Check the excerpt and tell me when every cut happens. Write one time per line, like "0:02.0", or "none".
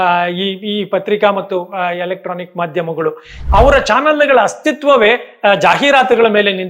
0:03.4